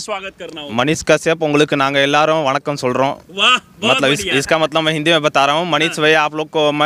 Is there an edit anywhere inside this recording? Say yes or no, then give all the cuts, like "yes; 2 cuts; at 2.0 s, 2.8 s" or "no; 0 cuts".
no; 0 cuts